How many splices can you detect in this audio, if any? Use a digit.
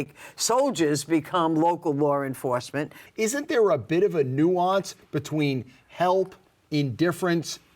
1